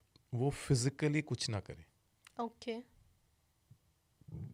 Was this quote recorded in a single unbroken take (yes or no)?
yes